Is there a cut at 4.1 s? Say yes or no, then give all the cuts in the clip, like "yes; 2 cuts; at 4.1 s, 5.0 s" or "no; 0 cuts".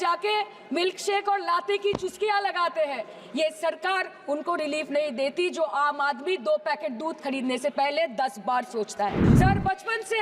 no; 1 cut; at 9.2 s